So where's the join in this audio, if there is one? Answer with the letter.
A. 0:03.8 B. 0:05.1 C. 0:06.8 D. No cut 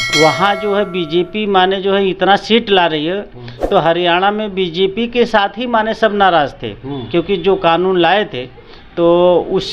D